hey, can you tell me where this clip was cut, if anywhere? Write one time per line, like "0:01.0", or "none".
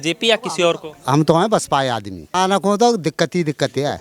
0:02.3